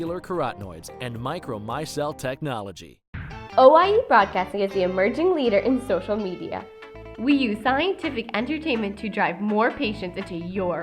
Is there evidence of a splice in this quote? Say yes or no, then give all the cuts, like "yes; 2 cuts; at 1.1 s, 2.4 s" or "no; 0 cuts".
yes; 1 cut; at 3.2 s